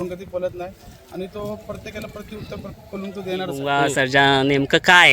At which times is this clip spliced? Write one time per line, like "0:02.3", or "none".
0:03.6

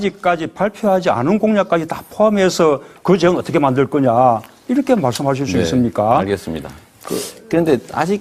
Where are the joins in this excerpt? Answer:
0:03.8

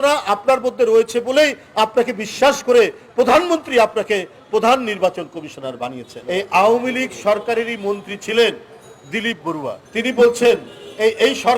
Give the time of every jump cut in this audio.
0:06.1
0:09.8

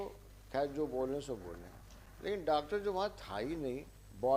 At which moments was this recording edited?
none

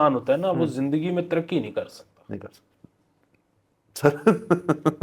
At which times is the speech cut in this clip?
none

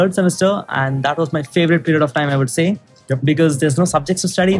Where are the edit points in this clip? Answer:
none

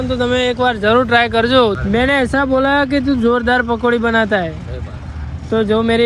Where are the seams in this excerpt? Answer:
0:01.8

